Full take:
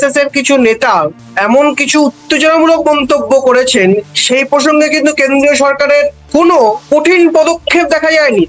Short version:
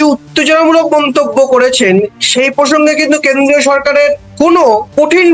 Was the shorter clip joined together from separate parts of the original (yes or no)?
no